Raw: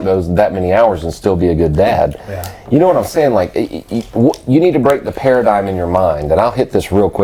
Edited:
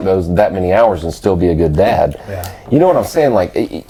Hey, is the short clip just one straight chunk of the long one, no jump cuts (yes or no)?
yes